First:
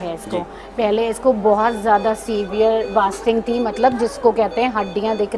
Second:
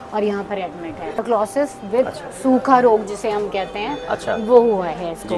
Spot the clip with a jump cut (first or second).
second